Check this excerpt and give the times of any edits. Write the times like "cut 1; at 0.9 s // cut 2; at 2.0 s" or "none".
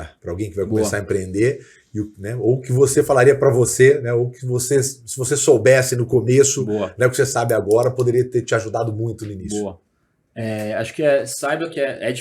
none